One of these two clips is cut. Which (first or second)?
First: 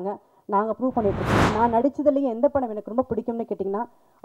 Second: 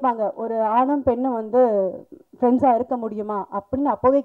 first